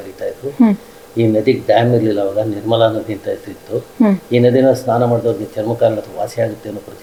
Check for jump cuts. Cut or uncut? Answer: uncut